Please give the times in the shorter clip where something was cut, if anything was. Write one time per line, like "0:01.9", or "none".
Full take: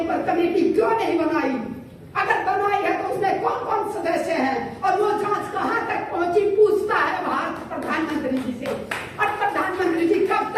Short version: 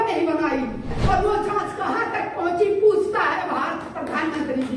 0:01.0